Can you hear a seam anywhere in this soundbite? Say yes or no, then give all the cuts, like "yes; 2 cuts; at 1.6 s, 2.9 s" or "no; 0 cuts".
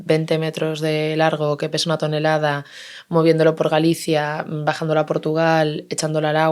no; 0 cuts